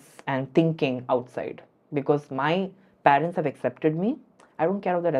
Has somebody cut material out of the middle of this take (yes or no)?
no